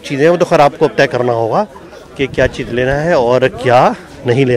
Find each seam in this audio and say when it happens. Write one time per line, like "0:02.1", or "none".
none